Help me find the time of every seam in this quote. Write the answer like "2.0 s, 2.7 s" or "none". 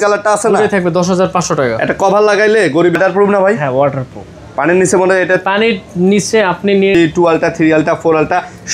3.0 s, 6.9 s